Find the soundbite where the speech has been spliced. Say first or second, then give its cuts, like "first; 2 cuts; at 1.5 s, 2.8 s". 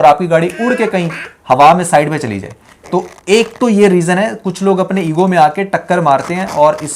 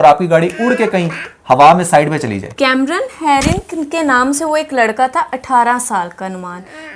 second; 1 cut; at 2.4 s